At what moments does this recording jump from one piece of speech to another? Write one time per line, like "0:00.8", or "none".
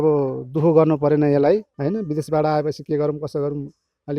0:01.7